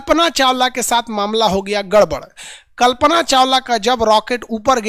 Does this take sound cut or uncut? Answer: uncut